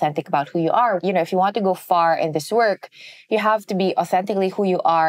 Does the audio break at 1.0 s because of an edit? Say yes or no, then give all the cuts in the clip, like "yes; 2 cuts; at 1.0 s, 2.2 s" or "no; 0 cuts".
yes; 1 cut; at 1.0 s